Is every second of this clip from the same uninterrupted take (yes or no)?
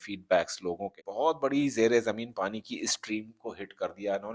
no